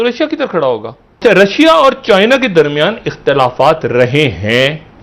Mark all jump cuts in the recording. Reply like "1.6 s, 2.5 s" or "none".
1.2 s

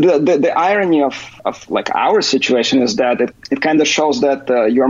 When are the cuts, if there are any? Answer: 1.3 s, 3.3 s

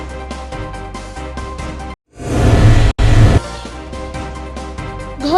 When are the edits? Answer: 1.4 s

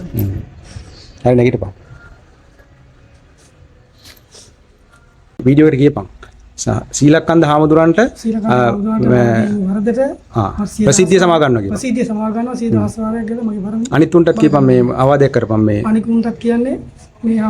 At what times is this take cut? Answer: 5.4 s

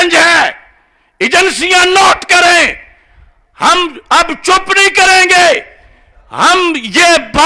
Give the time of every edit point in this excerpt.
none

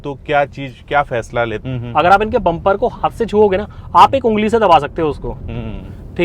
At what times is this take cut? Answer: 1.6 s

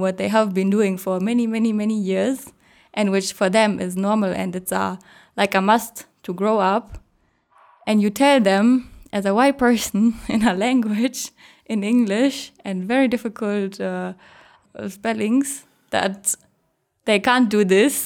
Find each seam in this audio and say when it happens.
14.6 s

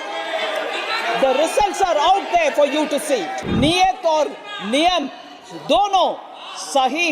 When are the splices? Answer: 3.4 s

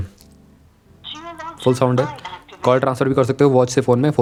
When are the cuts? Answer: none

